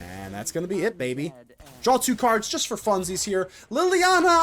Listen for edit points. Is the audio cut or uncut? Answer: uncut